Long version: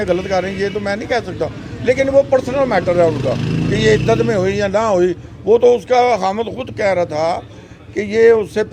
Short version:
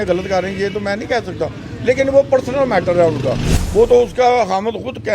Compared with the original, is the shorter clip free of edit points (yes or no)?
no